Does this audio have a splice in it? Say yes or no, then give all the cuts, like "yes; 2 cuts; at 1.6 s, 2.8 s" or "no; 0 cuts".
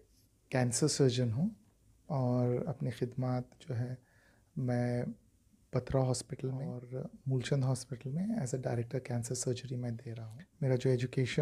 yes; 2 cuts; at 6.8 s, 10.2 s